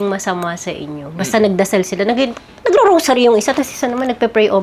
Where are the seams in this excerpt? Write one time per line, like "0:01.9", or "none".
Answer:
none